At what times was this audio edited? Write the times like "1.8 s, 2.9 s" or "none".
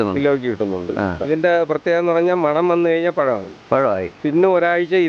1.2 s